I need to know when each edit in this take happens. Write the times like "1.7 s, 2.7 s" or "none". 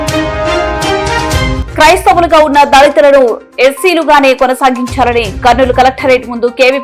none